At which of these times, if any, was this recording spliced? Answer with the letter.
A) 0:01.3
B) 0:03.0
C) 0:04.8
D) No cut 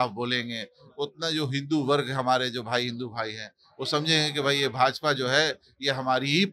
D